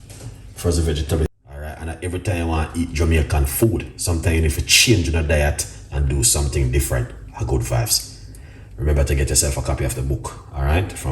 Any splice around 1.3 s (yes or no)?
yes